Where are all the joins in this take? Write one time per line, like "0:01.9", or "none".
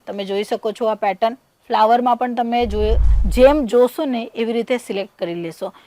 0:03.1